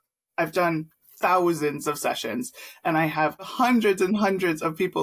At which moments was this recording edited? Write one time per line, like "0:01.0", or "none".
0:03.4